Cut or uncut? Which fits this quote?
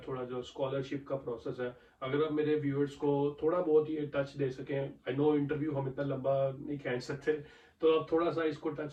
uncut